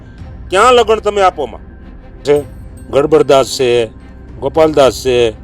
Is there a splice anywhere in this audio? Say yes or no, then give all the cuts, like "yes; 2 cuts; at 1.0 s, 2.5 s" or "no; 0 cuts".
yes; 1 cut; at 2.2 s